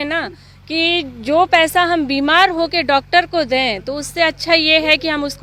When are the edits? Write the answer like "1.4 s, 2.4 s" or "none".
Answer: none